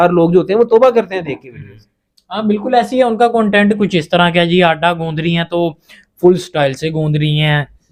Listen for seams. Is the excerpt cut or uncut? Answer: uncut